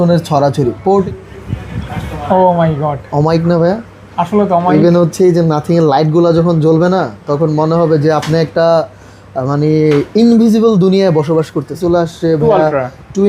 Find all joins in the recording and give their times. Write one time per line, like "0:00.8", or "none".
0:01.0
0:11.8